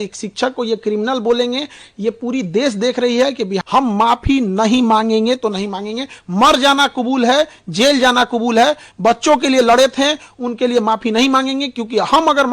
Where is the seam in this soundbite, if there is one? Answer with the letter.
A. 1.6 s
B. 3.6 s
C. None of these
B